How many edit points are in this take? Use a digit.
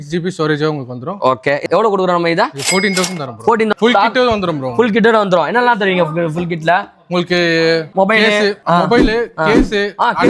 2